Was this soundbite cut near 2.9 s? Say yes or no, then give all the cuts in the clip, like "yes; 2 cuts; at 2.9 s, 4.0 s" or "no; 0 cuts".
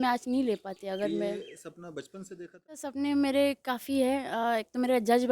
yes; 1 cut; at 2.9 s